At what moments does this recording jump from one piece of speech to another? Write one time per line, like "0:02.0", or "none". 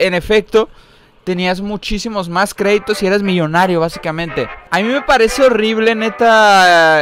0:04.6